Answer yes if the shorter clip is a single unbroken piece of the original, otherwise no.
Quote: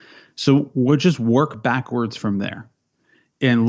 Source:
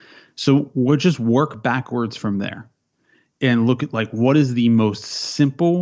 yes